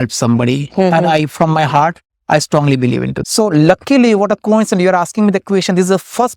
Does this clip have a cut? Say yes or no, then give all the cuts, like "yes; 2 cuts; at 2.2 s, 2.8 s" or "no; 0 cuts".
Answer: yes; 1 cut; at 3.1 s